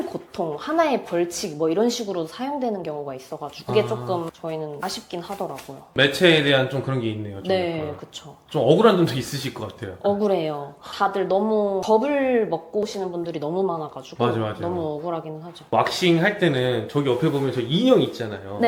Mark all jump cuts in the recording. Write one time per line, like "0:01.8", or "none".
none